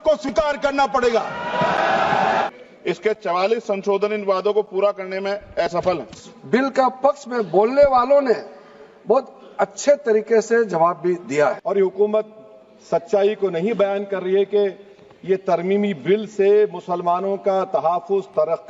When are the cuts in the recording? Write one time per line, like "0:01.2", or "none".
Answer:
0:02.5
0:06.3
0:11.6